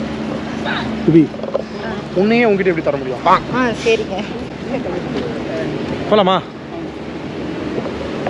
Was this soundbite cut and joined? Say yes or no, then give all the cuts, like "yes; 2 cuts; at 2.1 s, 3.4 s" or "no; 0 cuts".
no; 0 cuts